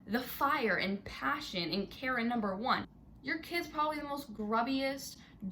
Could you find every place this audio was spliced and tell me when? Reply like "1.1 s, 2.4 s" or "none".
3.0 s